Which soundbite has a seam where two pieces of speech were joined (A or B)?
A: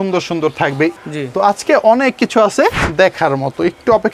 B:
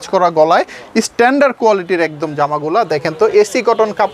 A